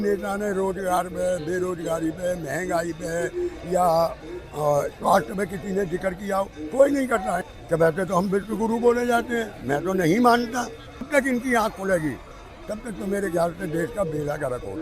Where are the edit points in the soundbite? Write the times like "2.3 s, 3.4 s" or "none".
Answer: 7.4 s, 11.1 s